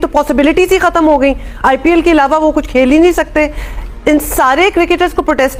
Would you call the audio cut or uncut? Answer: uncut